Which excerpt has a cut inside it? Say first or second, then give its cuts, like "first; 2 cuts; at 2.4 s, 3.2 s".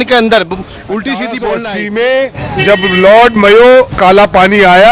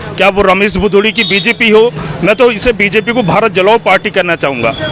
first; 1 cut; at 1.6 s